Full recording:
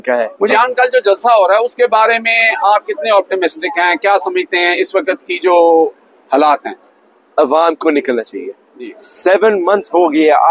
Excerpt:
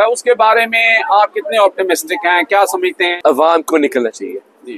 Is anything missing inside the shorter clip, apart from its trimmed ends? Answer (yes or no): yes